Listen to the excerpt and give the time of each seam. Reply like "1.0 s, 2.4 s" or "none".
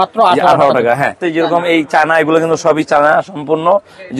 1.2 s